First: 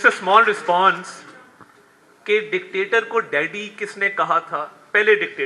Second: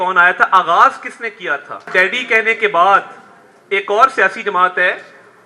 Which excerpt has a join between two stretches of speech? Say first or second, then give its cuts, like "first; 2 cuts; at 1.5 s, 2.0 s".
second; 1 cut; at 1.9 s